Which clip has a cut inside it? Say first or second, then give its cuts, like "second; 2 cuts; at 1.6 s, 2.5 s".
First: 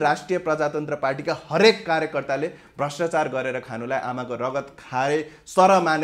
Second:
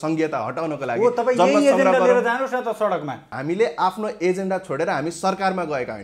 second; 1 cut; at 3.3 s